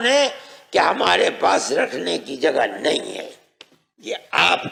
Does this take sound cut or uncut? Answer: uncut